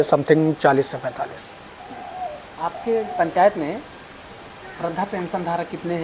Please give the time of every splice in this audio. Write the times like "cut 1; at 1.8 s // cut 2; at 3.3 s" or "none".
none